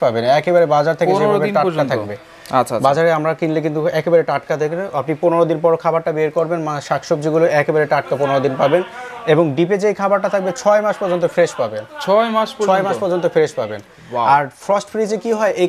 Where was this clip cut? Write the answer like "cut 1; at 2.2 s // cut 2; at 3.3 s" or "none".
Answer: none